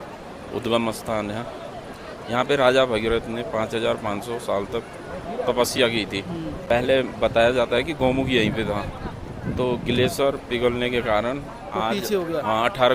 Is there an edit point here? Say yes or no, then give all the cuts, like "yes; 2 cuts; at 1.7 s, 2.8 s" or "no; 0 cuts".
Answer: yes; 1 cut; at 6.6 s